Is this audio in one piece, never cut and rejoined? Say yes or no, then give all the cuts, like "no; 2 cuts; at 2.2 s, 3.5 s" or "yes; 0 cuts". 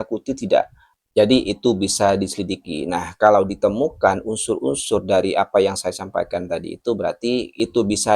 yes; 0 cuts